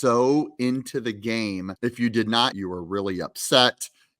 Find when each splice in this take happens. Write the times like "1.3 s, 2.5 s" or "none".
1.7 s, 2.5 s